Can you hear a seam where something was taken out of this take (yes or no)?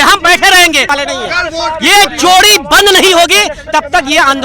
yes